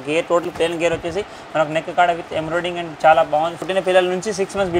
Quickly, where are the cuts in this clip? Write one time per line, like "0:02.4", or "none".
0:03.6